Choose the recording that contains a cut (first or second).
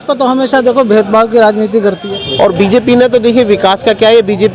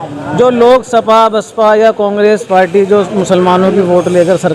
first